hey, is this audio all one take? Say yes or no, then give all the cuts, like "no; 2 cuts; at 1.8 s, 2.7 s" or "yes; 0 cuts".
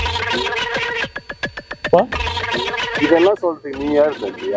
yes; 0 cuts